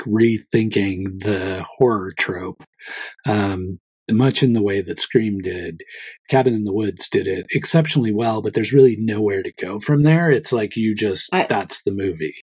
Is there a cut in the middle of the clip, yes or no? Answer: no